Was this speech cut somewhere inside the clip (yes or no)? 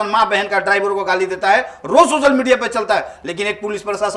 no